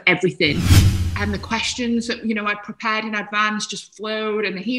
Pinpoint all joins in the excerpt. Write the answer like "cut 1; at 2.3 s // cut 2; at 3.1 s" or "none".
cut 1; at 0.9 s